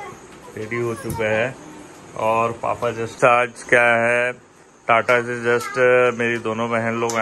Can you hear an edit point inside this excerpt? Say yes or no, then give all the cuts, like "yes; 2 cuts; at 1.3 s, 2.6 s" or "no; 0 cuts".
yes; 1 cut; at 3.1 s